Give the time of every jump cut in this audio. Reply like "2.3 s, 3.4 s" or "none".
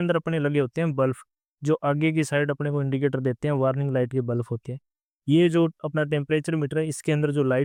none

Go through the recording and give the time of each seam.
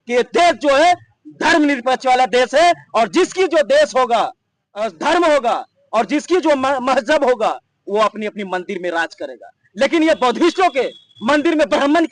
none

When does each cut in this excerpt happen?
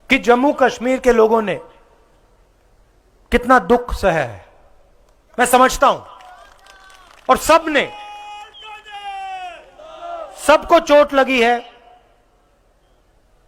none

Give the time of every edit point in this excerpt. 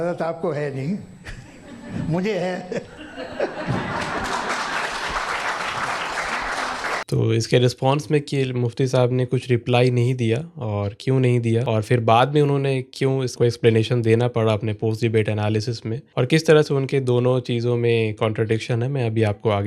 7.1 s

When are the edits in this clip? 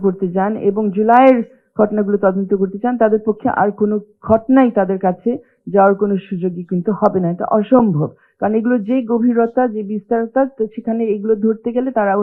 none

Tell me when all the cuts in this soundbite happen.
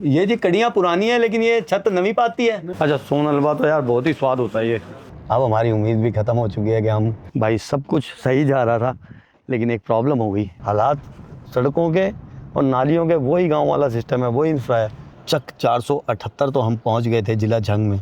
2.7 s, 5.1 s, 7.2 s, 10.6 s, 15.1 s

